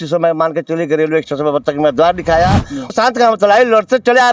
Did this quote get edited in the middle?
yes; 1 cut; at 2.9 s

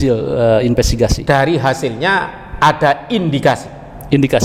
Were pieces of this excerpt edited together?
no; 0 cuts

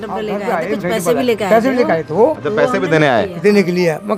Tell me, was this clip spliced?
no; 0 cuts

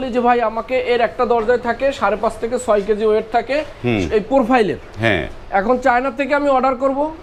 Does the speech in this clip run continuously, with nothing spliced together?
yes; 0 cuts

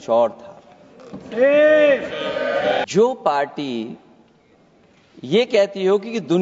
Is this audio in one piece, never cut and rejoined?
no; 1 cut; at 2.8 s

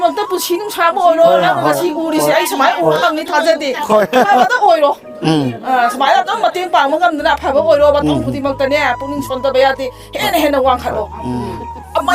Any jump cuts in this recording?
no; 0 cuts

